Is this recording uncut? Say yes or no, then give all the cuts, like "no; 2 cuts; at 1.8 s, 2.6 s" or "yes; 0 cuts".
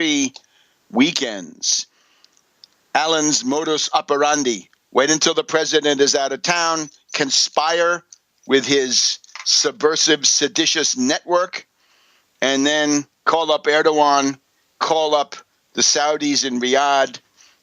no; 1 cut; at 4.7 s